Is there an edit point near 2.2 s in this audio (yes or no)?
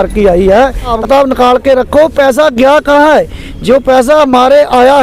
no